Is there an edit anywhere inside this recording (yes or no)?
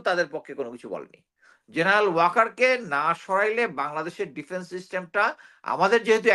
yes